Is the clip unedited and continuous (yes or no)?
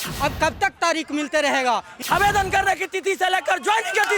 no